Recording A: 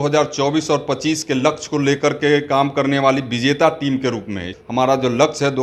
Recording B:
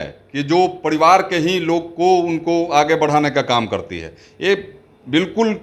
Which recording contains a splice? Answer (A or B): A